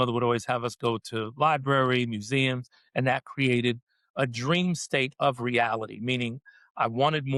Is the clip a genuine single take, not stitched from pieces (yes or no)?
yes